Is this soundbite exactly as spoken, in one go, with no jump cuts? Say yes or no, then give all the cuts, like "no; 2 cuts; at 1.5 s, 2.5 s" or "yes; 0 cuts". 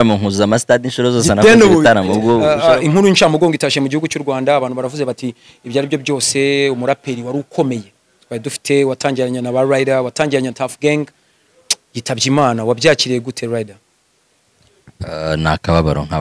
no; 1 cut; at 2.4 s